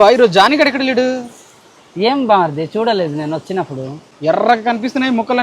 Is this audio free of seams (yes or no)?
no